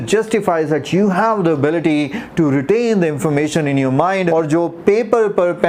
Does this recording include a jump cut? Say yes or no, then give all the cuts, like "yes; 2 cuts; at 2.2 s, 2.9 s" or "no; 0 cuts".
no; 0 cuts